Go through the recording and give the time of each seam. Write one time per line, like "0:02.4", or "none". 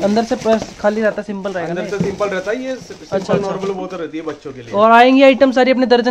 none